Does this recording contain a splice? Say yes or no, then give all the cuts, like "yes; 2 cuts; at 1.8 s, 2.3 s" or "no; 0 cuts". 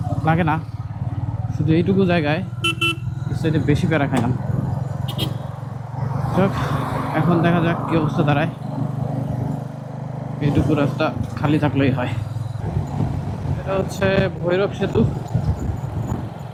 no; 0 cuts